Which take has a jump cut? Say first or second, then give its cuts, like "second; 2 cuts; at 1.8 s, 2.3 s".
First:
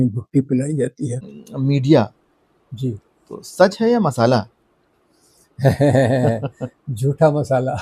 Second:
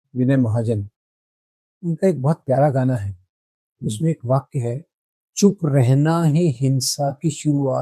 first; 1 cut; at 1.4 s